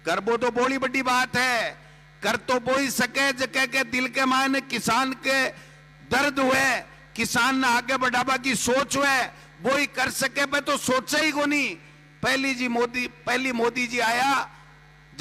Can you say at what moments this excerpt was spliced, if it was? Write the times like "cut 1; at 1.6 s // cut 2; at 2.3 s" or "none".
none